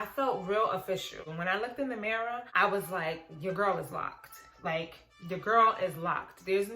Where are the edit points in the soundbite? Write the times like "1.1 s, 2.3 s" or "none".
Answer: 1.2 s, 2.5 s